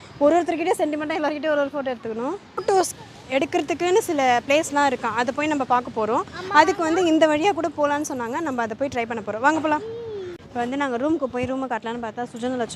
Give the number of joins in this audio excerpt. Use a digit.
2